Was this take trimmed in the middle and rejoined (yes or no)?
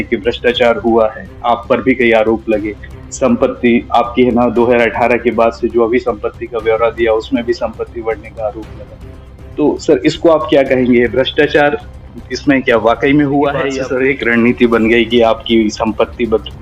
yes